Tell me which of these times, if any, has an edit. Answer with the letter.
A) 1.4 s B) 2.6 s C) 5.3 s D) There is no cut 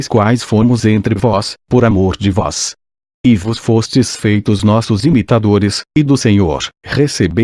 B